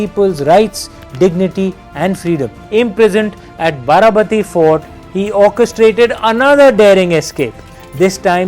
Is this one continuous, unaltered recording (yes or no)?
no